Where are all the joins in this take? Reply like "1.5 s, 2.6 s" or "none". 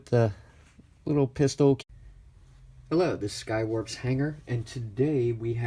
none

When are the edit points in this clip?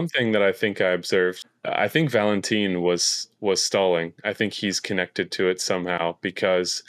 1.4 s

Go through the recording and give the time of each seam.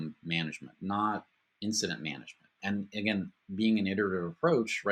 2.6 s

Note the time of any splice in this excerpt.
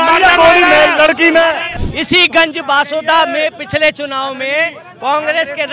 1.7 s

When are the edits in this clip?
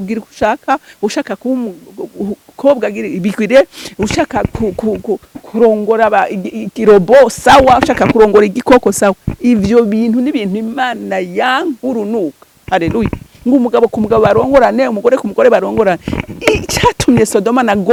none

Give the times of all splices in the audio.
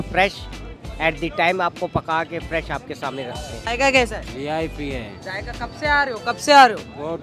3.6 s

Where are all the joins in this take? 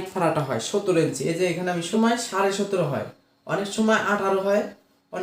1.7 s

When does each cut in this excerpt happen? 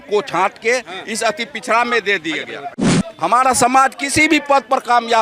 3.0 s

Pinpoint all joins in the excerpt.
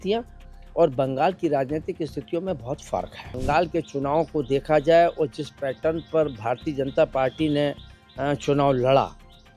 3.4 s

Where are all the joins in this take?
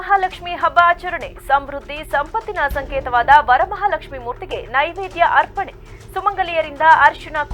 none

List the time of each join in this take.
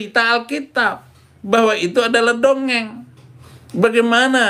3.2 s

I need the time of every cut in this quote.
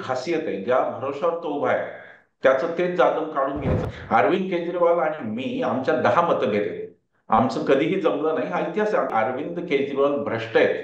3.8 s, 9.1 s

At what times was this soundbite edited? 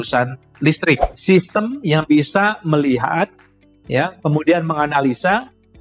1.1 s

